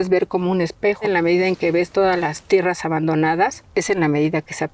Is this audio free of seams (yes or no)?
no